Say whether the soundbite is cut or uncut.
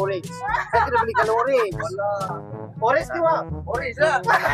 cut